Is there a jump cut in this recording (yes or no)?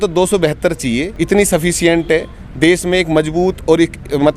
yes